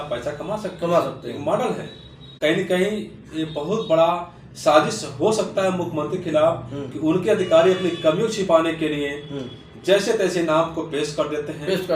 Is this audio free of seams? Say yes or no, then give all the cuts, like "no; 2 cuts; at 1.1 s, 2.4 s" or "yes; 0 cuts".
no; 1 cut; at 2.3 s